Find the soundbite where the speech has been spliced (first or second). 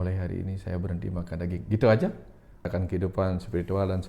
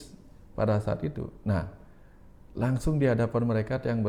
first